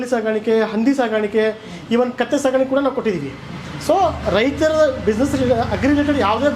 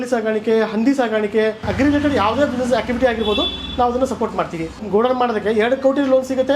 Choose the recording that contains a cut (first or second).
second